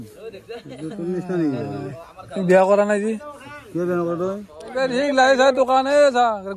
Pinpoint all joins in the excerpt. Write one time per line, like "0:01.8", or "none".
0:04.6